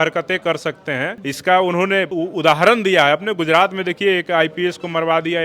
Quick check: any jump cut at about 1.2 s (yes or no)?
yes